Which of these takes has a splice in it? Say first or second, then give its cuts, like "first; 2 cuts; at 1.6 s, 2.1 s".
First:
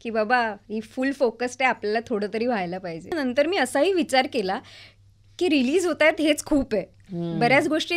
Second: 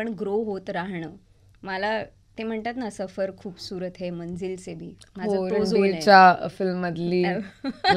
first; 1 cut; at 3.1 s